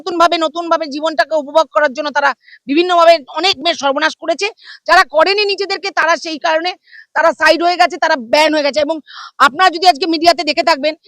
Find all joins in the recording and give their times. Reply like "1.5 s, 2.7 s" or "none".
none